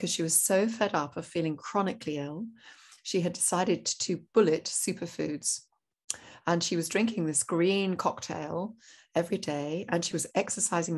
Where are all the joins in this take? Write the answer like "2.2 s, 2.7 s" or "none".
none